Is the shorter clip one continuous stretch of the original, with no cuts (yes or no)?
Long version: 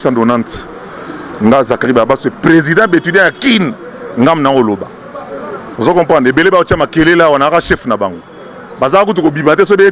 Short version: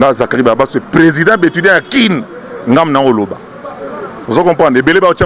yes